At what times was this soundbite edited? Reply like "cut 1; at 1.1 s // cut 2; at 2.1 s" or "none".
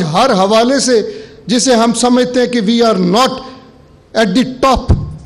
none

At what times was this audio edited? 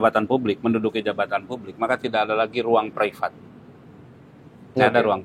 none

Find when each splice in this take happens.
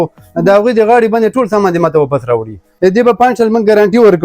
cut 1; at 2.6 s

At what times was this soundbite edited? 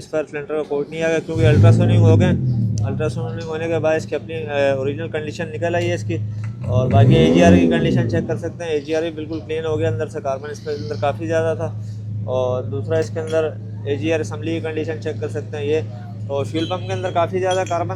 none

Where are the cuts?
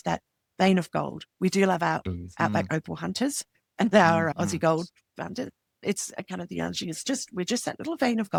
none

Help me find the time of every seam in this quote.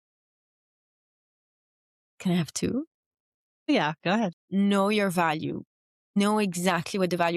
cut 1; at 4.4 s

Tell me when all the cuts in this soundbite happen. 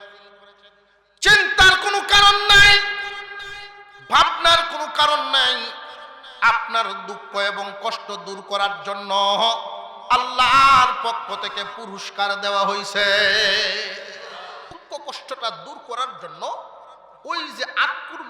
none

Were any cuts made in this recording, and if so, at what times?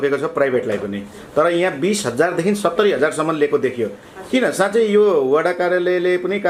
none

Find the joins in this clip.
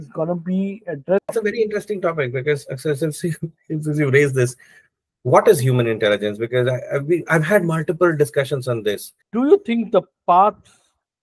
cut 1; at 1.3 s // cut 2; at 9.1 s

